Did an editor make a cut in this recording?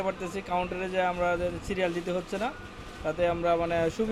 no; 0 cuts

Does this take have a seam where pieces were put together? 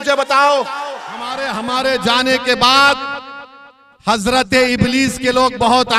yes; 1 cut; at 1.4 s

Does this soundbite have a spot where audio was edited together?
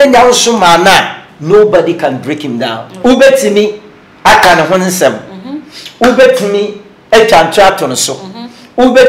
yes; 1 cut; at 2.8 s

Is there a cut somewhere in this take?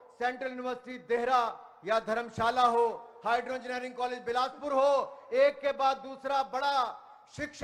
no; 0 cuts

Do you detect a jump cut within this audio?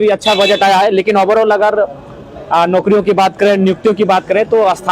no; 0 cuts

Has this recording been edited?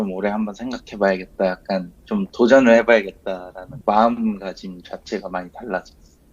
no; 0 cuts

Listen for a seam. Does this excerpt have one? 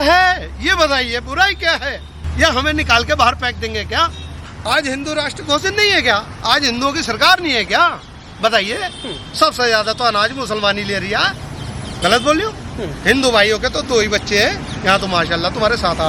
yes; 2 cuts; at 2.2 s, 4.5 s

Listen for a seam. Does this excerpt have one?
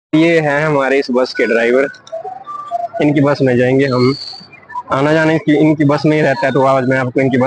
no; 0 cuts

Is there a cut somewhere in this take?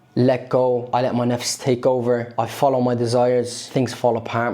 yes; 3 cuts; at 0.9 s, 2.3 s, 3.6 s

